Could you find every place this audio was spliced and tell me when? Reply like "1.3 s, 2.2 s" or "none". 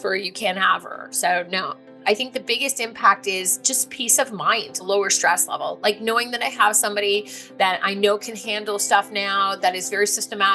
1.9 s, 4.8 s